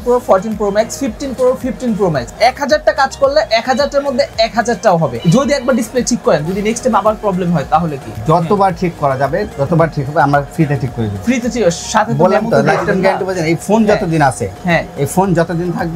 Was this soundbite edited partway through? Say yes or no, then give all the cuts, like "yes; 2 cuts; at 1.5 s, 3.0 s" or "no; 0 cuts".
yes; 3 cuts; at 2.3 s, 5.2 s, 8.2 s